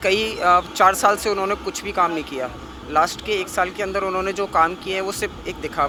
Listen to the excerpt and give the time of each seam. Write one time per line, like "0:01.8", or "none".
none